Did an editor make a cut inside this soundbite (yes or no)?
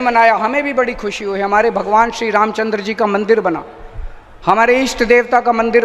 no